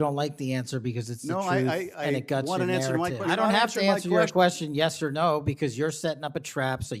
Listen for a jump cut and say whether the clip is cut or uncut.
cut